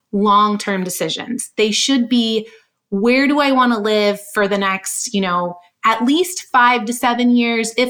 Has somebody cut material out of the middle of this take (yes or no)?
no